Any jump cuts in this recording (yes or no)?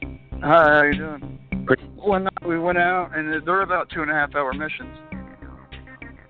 no